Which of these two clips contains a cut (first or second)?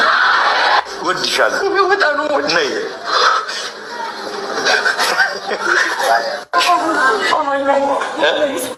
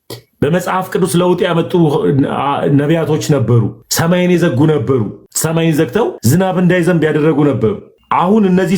second